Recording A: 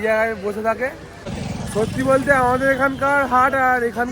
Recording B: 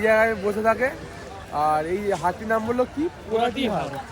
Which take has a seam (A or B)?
A